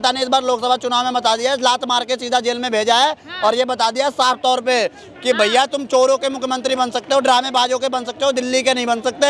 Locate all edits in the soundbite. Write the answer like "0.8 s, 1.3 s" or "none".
none